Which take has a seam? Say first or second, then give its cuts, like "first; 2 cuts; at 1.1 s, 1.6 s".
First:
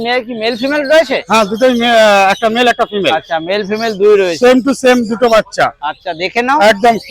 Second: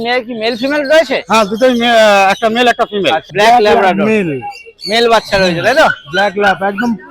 second; 1 cut; at 3.2 s